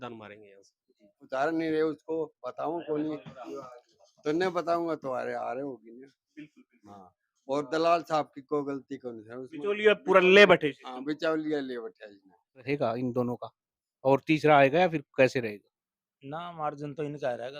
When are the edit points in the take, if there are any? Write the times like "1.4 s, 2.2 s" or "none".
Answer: 1.2 s, 12.7 s